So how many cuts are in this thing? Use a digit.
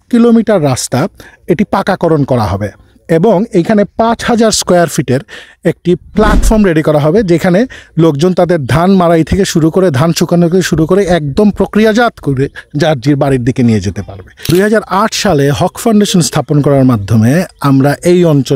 2